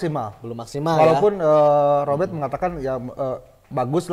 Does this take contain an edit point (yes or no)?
no